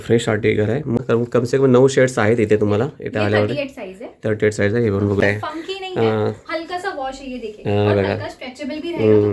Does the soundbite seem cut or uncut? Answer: cut